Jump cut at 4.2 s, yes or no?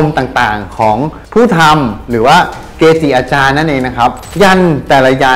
yes